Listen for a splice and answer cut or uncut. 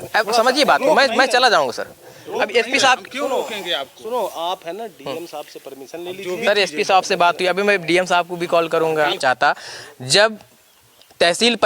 cut